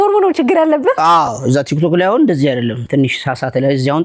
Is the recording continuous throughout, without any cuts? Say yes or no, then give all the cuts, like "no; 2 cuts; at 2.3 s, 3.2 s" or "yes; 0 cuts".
yes; 0 cuts